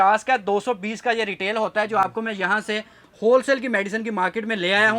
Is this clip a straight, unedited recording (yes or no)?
yes